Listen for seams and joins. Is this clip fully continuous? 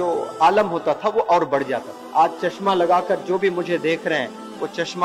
no; 1 cut; at 2.0 s

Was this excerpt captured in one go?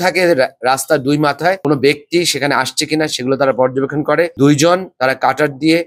yes; 0 cuts

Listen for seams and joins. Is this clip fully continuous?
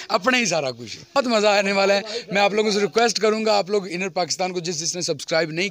no; 1 cut; at 1.2 s

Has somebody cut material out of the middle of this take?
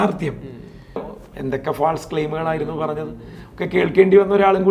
yes; 1 cut; at 1.0 s

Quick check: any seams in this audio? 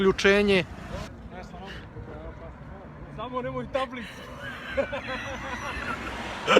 yes; 1 cut; at 1.1 s

